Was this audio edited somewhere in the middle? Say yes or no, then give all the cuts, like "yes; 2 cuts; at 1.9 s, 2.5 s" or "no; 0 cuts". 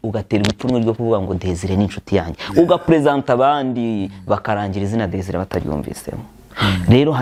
no; 0 cuts